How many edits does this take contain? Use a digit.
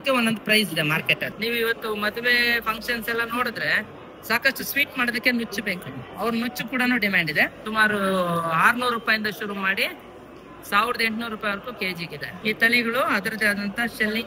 3